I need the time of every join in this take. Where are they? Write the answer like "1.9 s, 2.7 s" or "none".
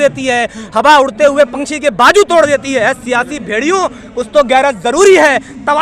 none